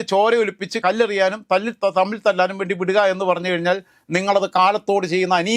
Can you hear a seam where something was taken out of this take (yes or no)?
no